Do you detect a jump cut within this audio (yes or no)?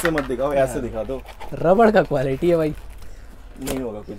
no